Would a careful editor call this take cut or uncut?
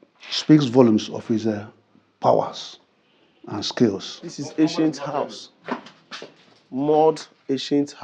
cut